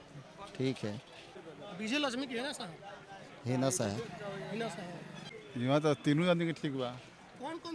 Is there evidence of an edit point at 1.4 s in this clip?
yes; 2 cuts; at 1.4 s, 5.2 s

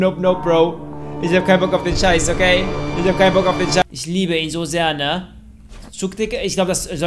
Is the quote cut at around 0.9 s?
no; 1 cut; at 3.8 s

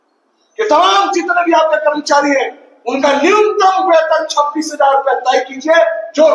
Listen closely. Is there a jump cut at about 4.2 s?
no; 0 cuts

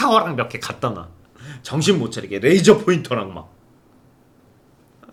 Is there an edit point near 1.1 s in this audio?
no; 0 cuts

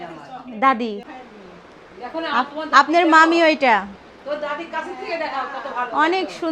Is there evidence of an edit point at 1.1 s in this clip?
yes; 1 cut; at 1.1 s

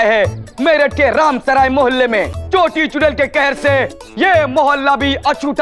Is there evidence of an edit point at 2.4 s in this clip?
yes; 1 cut; at 2.4 s

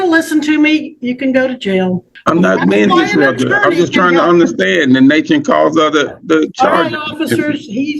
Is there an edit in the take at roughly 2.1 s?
yes; 1 cut; at 2.1 s

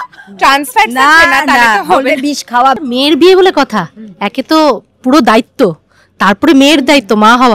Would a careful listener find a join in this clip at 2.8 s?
yes; 1 cut; at 2.8 s

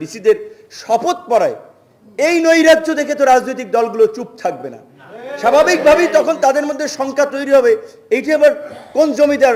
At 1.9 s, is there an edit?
no; 0 cuts

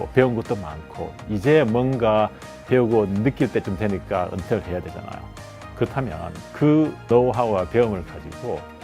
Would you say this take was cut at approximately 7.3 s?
no; 0 cuts

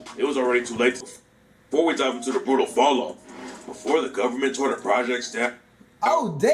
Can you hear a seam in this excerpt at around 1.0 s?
yes; 1 cut; at 1.0 s

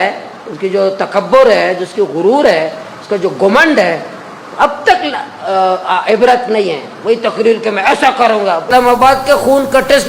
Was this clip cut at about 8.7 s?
yes; 1 cut; at 8.7 s

